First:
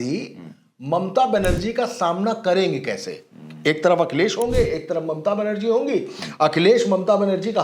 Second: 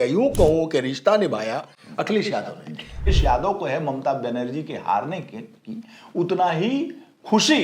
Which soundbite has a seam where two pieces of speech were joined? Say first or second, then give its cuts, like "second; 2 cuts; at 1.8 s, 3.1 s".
second; 1 cut; at 3.1 s